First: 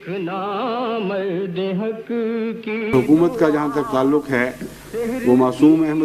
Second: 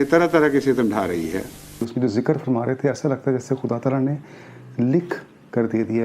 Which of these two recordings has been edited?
second; 1 cut; at 1.8 s

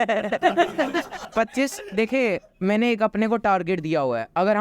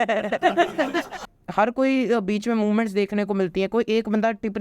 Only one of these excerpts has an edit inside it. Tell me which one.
second; 1 cut; at 1.2 s

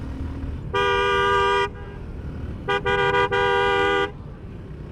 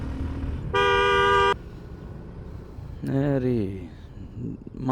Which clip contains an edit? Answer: second; 1 cut; at 1.5 s

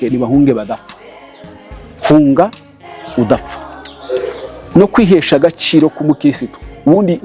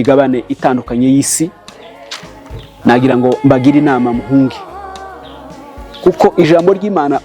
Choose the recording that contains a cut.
second; 2 cuts; at 4.5 s, 6.0 s

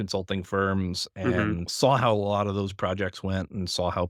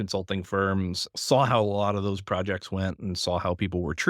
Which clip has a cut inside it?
second; 1 cut; at 1.1 s

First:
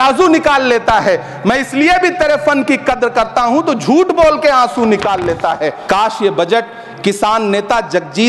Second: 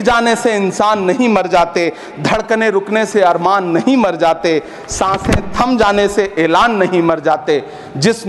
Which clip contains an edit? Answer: first; 1 cut; at 5.8 s

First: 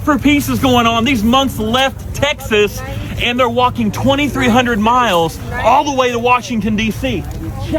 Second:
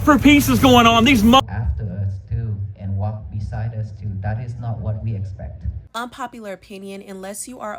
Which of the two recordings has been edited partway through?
second; 2 cuts; at 1.4 s, 5.8 s

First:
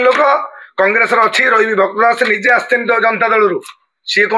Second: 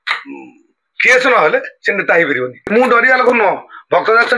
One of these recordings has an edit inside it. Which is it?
second; 1 cut; at 2.7 s

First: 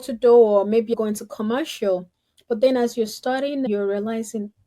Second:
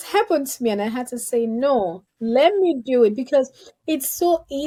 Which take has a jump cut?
first; 2 cuts; at 0.9 s, 3.7 s

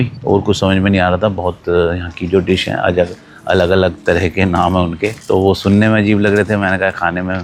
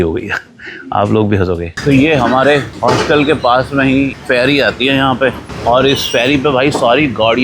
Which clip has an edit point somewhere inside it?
second; 4 cuts; at 1.7 s, 2.7 s, 4.1 s, 5.5 s

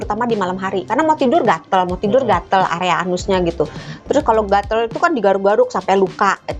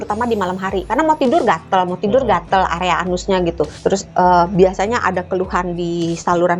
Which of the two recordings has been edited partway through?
second; 1 cut; at 3.7 s

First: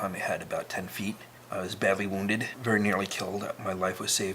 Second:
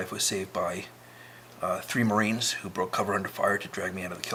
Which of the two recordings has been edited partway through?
first; 2 cuts; at 1.3 s, 2.5 s

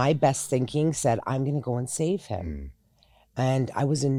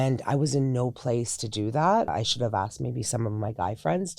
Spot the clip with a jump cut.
second; 1 cut; at 2.1 s

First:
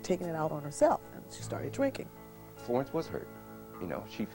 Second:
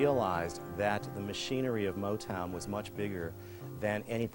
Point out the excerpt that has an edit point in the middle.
first; 1 cut; at 2.4 s

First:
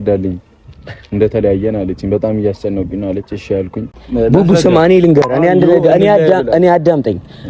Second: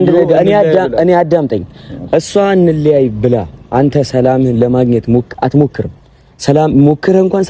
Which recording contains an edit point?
first; 1 cut; at 4.0 s

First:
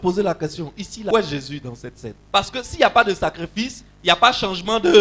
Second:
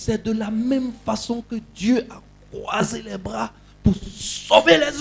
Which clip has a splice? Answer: first; 2 cuts; at 1.1 s, 2.1 s

